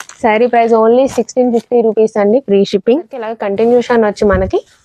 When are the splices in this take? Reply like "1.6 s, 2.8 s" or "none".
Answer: 3.4 s